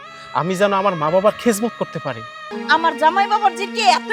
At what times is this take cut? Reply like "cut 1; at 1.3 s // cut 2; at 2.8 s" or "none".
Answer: cut 1; at 2.5 s